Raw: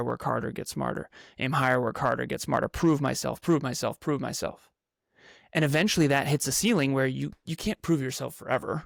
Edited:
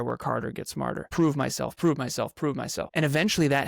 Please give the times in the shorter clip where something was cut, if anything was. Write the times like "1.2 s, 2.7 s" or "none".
1.1 s, 2.9 s